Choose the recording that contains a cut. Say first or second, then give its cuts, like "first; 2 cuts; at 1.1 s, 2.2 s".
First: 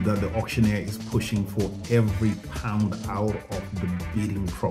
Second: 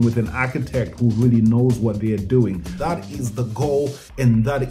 second; 1 cut; at 2.7 s